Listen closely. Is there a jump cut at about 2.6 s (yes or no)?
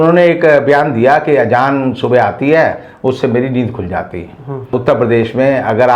no